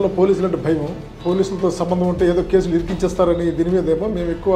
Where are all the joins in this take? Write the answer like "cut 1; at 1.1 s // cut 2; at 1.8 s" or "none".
cut 1; at 1.1 s

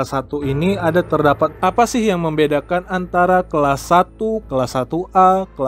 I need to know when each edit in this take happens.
cut 1; at 1.5 s // cut 2; at 4.4 s

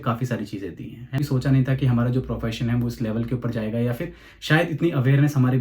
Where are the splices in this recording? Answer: cut 1; at 1.2 s

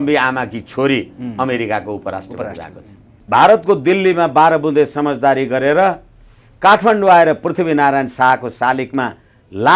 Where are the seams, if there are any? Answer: cut 1; at 3.1 s

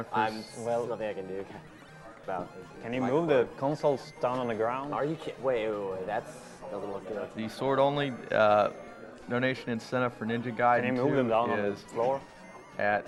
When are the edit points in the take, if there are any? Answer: none

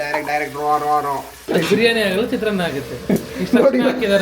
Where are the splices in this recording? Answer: cut 1; at 1.5 s

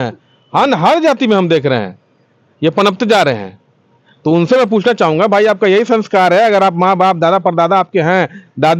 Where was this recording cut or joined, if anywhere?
none

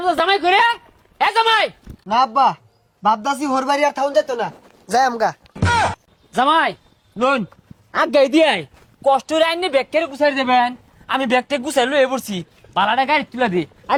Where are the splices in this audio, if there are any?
none

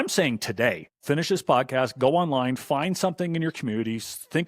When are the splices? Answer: cut 1; at 1.0 s

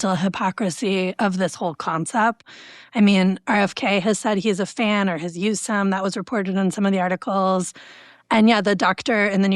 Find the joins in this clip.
cut 1; at 2.5 s

